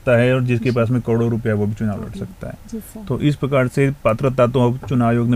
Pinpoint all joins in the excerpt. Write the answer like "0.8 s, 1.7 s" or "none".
none